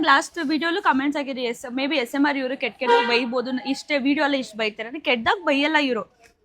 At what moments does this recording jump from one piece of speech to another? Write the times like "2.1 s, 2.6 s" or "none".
none